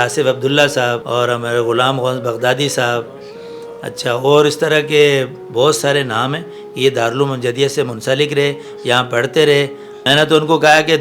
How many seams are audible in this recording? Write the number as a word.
two